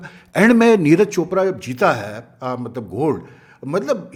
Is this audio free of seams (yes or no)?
yes